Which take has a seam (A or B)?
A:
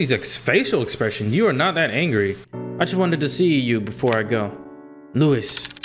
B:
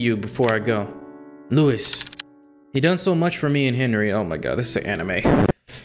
A